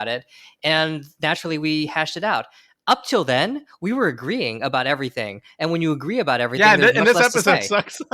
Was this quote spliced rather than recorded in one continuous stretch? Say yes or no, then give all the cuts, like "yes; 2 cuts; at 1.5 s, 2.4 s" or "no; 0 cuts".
no; 0 cuts